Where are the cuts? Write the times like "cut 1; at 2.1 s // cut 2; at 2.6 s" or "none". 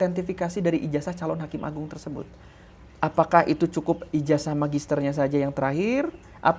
none